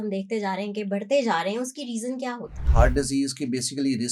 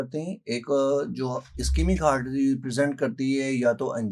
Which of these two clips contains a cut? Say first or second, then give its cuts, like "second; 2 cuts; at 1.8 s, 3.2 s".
first; 1 cut; at 2.6 s